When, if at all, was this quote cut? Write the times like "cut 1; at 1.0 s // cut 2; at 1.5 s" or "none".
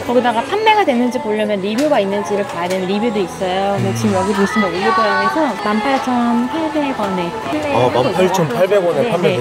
none